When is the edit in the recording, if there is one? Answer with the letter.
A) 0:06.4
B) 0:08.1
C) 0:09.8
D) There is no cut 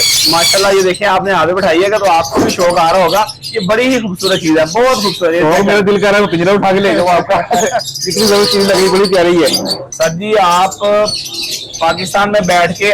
C